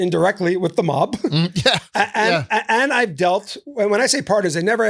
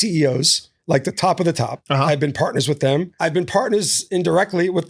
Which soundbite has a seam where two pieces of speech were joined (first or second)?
second